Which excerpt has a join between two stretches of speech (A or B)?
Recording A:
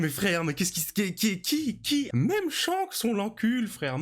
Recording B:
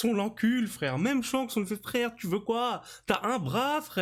A